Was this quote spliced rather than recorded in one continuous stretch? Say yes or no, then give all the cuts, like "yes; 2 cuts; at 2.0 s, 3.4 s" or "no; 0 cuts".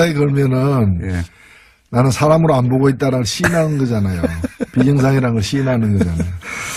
no; 0 cuts